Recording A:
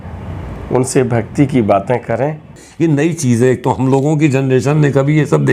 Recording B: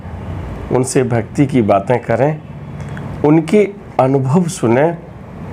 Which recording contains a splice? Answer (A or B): A